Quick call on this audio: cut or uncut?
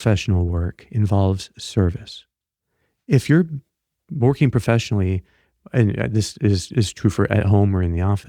uncut